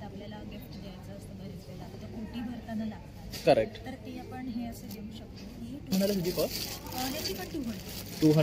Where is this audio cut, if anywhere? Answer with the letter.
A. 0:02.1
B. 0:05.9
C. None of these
B